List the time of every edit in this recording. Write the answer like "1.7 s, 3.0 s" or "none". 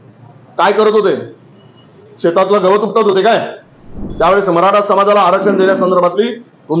4.0 s